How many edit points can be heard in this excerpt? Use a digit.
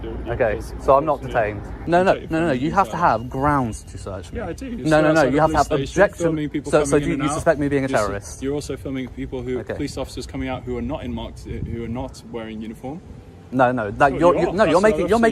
1